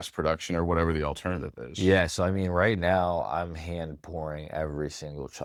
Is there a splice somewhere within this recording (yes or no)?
no